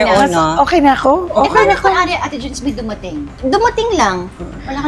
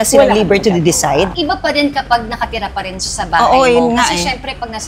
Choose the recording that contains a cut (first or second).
second